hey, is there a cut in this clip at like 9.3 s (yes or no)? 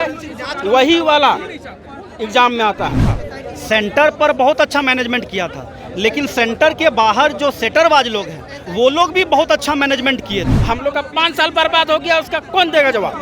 no